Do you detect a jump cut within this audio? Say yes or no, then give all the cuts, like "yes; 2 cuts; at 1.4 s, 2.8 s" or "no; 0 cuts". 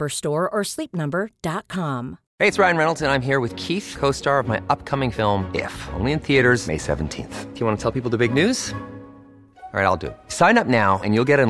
yes; 1 cut; at 2.2 s